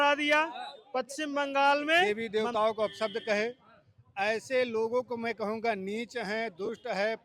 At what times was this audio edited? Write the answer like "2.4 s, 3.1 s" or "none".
2.0 s